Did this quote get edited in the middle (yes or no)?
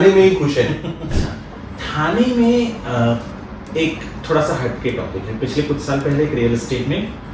yes